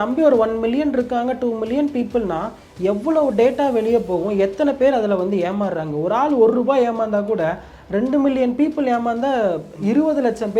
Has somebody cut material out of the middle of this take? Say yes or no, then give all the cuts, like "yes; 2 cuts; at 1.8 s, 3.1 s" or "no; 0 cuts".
no; 0 cuts